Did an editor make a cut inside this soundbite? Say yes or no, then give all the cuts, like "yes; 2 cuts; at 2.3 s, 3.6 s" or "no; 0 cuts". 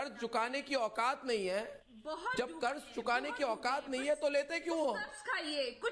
no; 0 cuts